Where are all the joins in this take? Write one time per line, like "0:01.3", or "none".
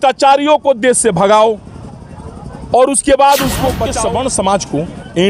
0:03.9